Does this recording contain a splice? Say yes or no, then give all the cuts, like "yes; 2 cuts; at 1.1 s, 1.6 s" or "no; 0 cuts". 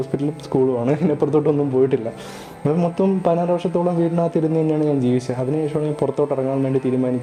no; 0 cuts